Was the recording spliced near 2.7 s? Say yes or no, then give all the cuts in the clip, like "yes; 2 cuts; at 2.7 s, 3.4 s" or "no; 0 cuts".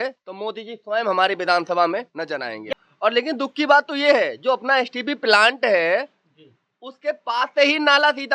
yes; 1 cut; at 2.7 s